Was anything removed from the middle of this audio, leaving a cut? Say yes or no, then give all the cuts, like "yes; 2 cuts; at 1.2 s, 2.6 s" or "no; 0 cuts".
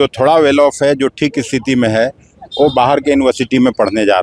no; 0 cuts